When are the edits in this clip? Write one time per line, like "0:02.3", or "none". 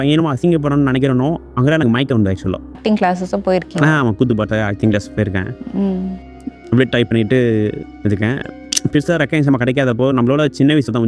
0:02.8